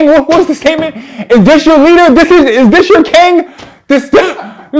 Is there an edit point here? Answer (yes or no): no